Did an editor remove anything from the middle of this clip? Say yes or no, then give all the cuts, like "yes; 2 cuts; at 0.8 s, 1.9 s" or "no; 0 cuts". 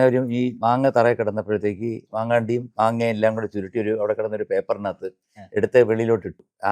no; 0 cuts